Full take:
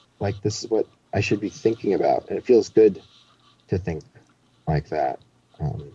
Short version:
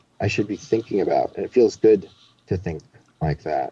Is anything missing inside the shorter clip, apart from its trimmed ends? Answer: yes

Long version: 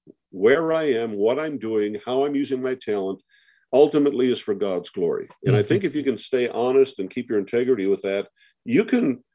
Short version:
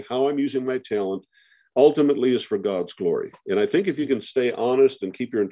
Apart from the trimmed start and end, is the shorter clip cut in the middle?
no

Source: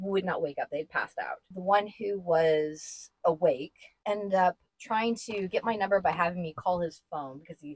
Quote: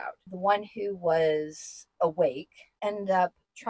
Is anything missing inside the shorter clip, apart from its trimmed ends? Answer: no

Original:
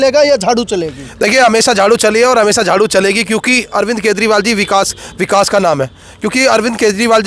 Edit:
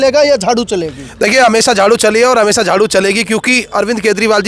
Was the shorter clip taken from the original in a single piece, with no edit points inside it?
yes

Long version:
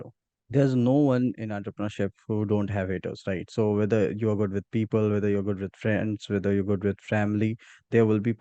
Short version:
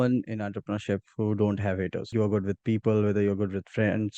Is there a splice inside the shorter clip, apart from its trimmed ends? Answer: yes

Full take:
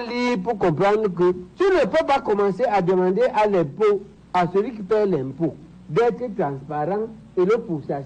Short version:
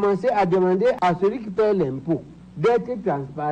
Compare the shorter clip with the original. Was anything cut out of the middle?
yes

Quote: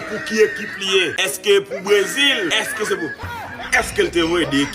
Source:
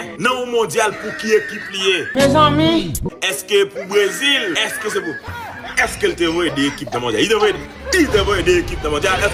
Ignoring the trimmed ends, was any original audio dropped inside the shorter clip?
yes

